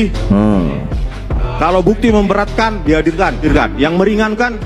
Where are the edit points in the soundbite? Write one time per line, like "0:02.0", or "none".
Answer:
0:03.4